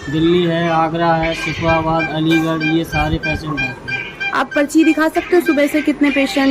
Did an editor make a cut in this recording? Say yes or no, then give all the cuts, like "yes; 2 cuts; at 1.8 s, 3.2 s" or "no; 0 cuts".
no; 0 cuts